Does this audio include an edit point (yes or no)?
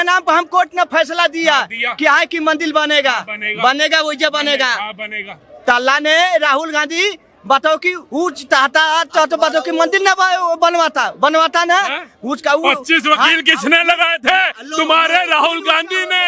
no